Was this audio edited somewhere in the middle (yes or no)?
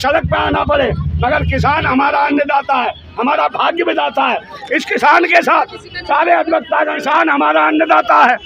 yes